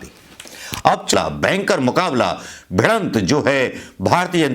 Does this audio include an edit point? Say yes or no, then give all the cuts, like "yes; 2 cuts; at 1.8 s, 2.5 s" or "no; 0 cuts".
yes; 1 cut; at 1.1 s